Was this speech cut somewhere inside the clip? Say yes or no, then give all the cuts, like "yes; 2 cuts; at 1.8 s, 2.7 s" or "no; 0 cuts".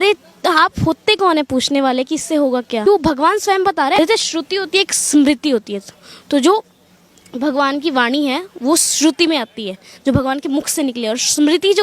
yes; 2 cuts; at 2.8 s, 4.0 s